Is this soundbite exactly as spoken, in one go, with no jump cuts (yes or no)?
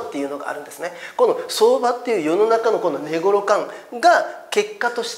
yes